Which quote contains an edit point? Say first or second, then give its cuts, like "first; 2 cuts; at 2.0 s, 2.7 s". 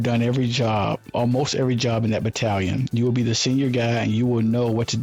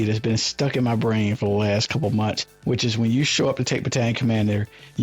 second; 1 cut; at 2.5 s